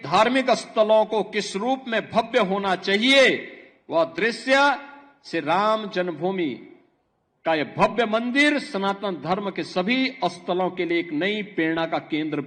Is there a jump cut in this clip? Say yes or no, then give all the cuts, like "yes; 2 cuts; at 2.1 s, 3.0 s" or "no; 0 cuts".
no; 0 cuts